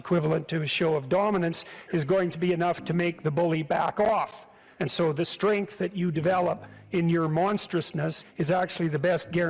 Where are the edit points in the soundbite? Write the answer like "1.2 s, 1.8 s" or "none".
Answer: 4.0 s, 6.7 s, 8.6 s